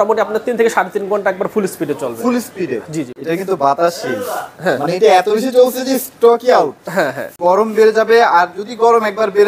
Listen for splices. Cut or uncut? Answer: cut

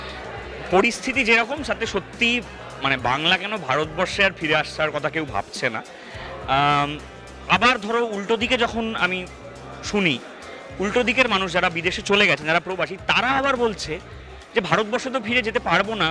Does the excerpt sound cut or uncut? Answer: uncut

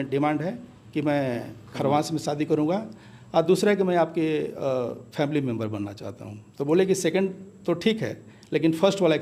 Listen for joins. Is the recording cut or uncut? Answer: uncut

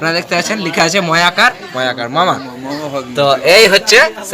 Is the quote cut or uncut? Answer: uncut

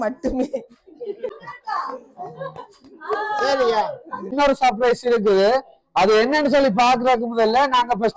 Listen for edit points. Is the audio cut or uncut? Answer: cut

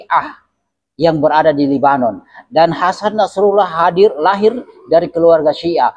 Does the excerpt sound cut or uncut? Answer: uncut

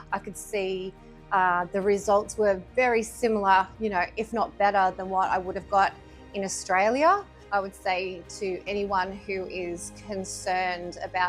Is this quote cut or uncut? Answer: cut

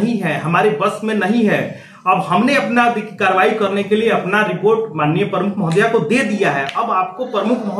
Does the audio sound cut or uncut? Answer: uncut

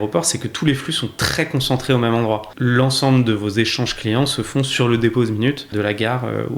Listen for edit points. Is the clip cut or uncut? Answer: cut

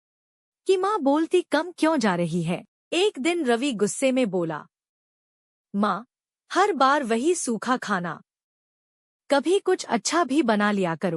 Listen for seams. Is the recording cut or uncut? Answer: cut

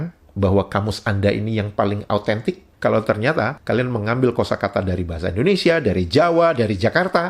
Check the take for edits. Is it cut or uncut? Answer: cut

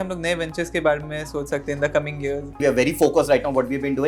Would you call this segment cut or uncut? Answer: cut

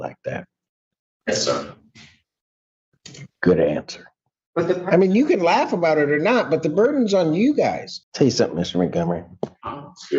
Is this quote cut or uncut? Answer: cut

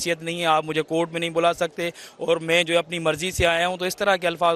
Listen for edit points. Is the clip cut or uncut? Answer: uncut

